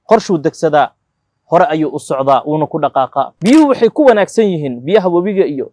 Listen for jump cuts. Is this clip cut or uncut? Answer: cut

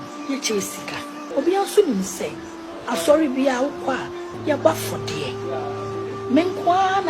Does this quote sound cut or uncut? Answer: cut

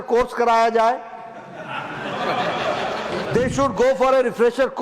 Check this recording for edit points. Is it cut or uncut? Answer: cut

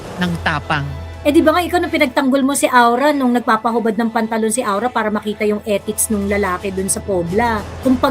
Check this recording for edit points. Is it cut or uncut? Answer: cut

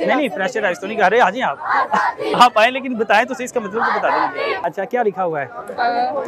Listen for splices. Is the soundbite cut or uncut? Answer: cut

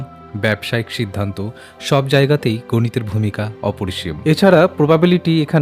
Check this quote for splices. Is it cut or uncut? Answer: cut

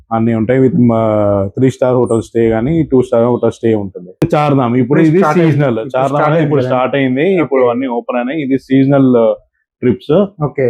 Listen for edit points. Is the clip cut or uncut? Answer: cut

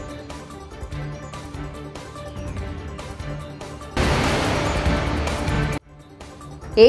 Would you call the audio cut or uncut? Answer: uncut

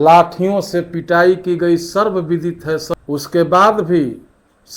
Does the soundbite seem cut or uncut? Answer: cut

